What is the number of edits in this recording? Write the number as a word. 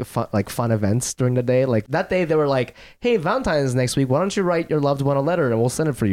one